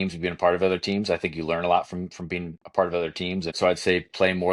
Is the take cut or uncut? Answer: cut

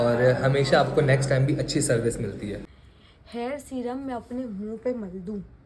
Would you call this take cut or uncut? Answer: cut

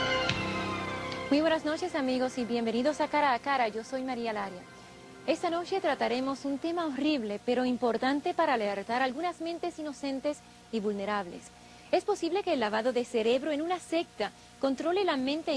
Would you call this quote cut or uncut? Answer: uncut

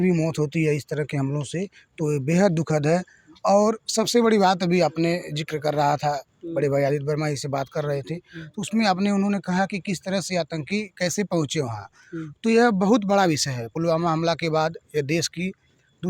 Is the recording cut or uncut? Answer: uncut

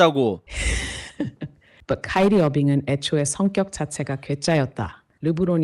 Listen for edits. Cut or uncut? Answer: cut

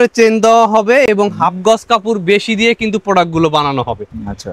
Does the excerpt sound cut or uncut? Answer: uncut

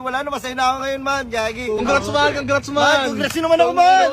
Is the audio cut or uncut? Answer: cut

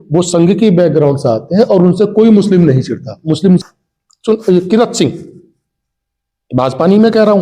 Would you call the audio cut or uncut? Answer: cut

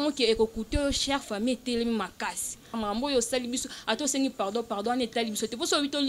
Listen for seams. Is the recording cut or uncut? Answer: cut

